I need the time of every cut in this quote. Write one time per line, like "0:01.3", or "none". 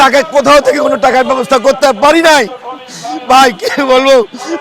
none